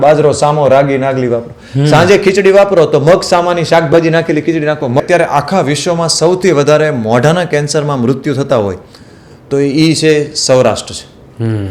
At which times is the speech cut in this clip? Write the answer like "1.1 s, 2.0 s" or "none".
5.0 s